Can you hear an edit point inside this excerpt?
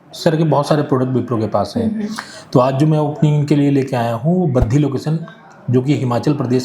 no; 0 cuts

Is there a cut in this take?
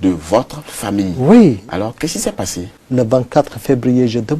yes; 1 cut; at 2.8 s

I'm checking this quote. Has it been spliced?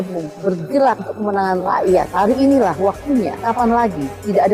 yes; 3 cuts; at 1.1 s, 2.1 s, 3.4 s

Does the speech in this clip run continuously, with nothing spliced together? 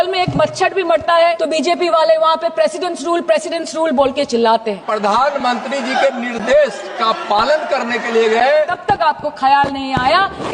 no; 3 cuts; at 1.4 s, 4.8 s, 8.8 s

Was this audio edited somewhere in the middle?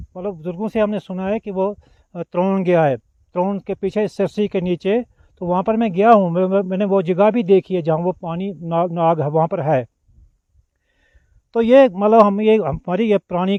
no; 0 cuts

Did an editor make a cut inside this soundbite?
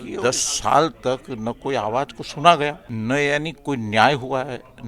yes; 1 cut; at 2.9 s

